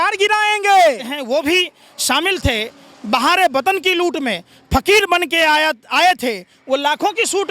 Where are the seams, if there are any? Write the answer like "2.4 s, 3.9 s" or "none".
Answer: 1.1 s